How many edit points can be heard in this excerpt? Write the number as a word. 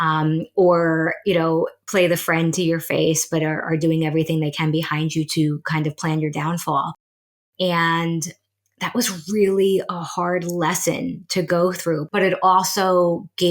two